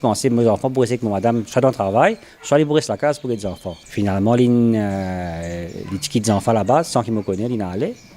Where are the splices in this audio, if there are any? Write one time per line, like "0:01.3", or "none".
0:01.6